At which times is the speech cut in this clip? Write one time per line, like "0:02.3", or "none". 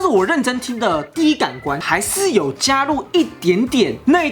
0:01.8